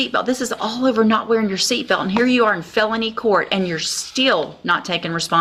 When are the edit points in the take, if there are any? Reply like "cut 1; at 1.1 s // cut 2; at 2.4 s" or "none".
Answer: none